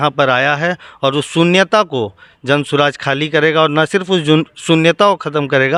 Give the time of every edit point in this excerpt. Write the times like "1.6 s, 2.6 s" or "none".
none